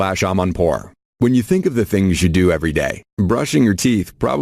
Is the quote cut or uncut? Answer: cut